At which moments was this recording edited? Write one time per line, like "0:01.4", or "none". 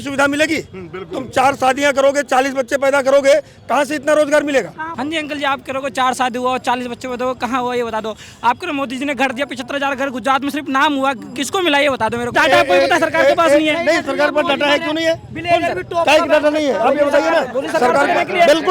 0:04.9
0:12.3